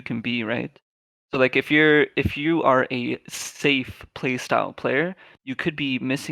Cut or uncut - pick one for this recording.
uncut